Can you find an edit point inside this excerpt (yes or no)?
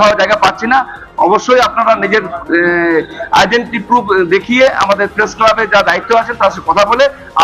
no